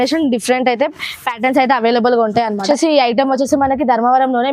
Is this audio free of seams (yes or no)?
no